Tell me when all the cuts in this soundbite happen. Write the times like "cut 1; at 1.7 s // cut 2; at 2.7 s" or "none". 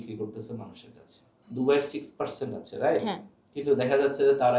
none